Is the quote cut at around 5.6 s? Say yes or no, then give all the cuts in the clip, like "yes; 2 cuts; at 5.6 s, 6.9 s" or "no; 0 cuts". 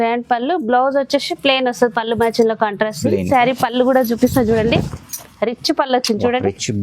no; 1 cut; at 3.3 s